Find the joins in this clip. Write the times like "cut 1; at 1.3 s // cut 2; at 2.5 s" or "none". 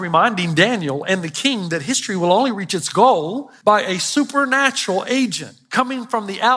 cut 1; at 3.4 s